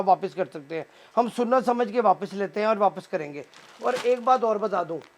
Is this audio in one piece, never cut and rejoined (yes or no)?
yes